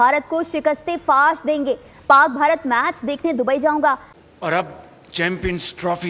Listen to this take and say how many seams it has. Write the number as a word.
one